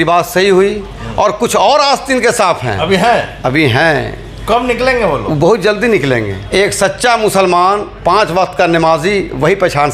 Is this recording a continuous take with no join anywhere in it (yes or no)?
no